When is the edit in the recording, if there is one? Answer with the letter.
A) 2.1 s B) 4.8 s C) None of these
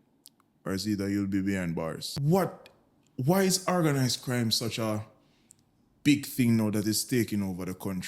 A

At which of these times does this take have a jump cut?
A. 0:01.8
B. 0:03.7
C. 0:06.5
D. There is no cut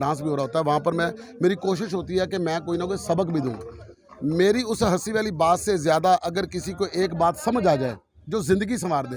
D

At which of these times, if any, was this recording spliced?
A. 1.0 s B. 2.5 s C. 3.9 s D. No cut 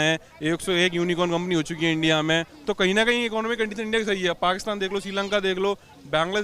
B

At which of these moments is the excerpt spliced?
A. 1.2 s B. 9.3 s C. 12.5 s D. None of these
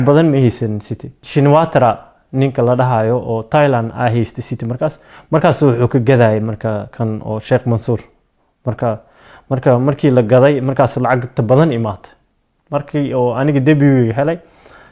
A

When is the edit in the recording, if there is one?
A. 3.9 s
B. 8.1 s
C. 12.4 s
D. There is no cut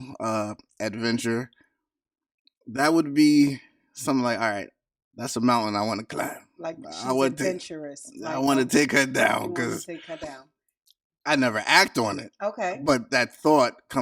D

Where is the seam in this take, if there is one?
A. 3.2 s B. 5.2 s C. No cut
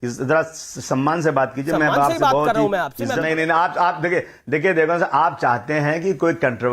A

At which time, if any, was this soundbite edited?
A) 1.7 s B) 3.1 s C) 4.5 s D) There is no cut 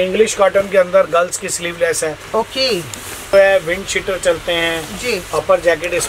B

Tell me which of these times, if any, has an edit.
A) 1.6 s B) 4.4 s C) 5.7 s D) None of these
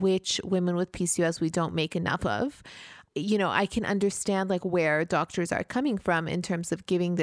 D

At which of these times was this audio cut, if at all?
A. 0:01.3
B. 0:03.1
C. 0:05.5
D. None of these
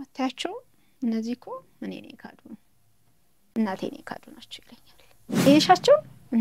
C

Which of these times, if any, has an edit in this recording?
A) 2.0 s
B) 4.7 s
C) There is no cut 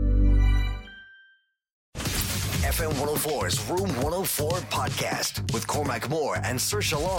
A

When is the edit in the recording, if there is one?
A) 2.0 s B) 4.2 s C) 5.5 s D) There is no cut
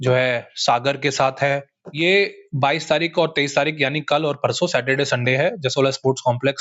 A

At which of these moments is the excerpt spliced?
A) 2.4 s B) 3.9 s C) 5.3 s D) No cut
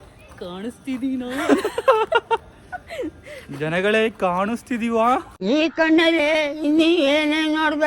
C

